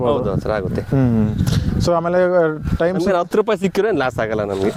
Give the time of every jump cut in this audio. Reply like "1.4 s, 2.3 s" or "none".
none